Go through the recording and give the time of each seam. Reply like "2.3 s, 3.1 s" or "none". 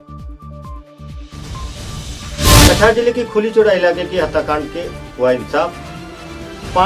2.4 s